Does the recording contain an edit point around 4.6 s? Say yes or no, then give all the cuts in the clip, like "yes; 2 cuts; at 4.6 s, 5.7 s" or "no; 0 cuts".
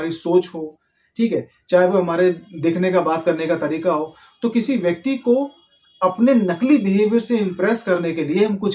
no; 0 cuts